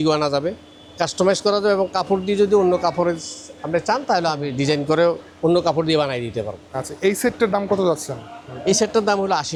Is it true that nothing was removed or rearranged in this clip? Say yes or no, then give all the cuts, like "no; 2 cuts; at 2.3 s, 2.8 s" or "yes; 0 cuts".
yes; 0 cuts